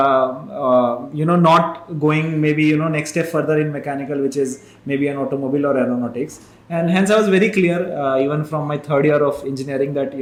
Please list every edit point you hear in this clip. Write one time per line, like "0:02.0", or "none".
none